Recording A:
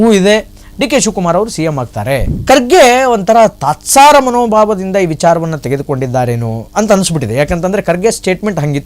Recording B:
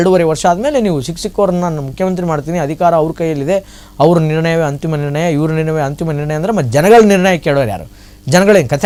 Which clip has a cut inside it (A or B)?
A